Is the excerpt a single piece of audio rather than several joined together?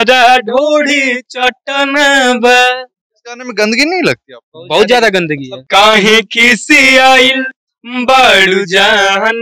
no; 1 cut; at 5.5 s

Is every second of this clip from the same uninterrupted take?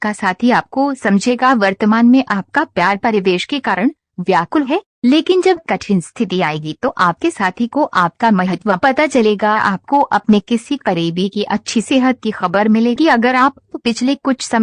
no; 2 cuts; at 8.6 s, 9.8 s

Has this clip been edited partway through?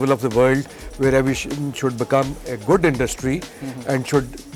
no; 0 cuts

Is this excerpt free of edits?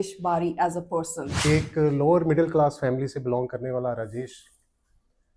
no; 1 cut; at 1.2 s

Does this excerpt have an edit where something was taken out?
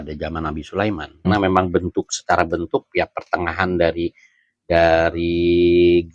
yes; 1 cut; at 1.2 s

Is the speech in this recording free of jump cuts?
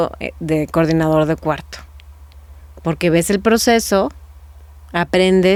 yes; 0 cuts

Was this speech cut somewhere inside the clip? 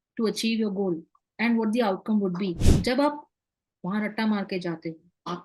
yes; 1 cut; at 2.7 s

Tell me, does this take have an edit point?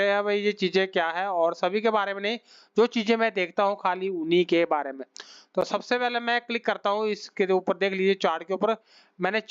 no; 0 cuts

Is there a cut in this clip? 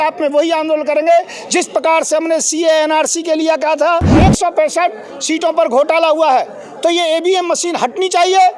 yes; 1 cut; at 4.2 s

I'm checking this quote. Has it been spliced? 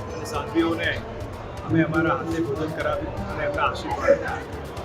no; 0 cuts

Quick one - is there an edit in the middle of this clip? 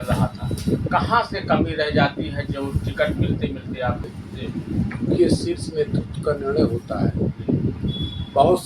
yes; 1 cut; at 4.1 s

